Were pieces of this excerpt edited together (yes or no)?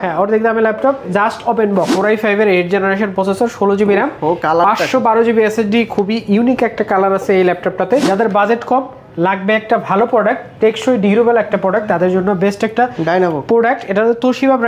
yes